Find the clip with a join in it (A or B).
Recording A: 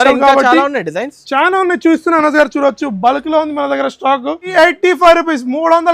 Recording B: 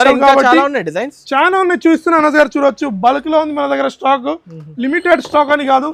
A